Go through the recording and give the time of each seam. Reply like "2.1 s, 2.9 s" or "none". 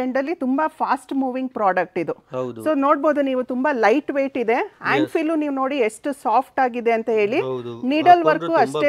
none